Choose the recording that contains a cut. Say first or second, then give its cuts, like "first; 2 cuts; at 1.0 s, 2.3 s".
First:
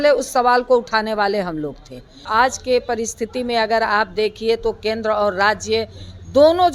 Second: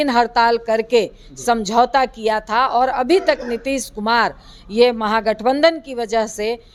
first; 1 cut; at 2.3 s